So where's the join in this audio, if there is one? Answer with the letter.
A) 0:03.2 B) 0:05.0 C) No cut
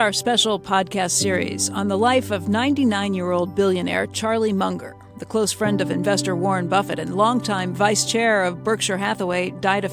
C